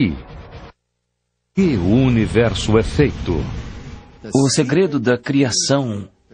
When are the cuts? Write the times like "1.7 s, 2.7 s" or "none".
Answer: 5.0 s